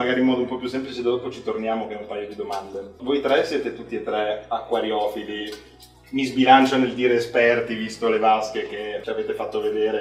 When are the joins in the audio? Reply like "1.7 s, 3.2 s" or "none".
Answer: 3.0 s, 9.0 s